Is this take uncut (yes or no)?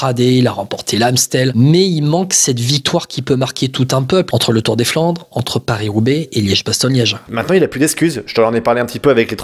no